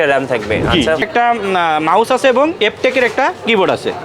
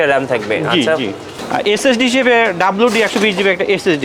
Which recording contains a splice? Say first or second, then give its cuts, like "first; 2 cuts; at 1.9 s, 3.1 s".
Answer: first; 2 cuts; at 1.1 s, 2.6 s